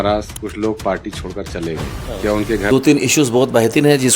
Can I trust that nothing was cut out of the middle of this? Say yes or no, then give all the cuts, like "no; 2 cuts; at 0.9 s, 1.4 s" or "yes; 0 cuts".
no; 1 cut; at 2.7 s